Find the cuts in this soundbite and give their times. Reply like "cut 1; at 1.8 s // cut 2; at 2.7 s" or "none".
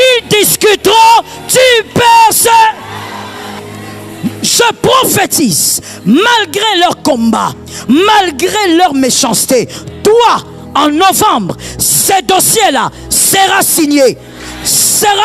cut 1; at 3.6 s